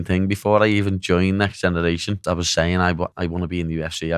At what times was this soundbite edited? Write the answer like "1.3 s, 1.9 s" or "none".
2.2 s, 3.1 s